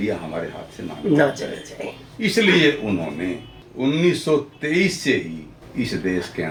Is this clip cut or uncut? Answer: uncut